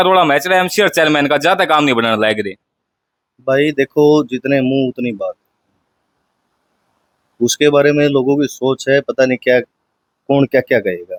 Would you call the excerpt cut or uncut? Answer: uncut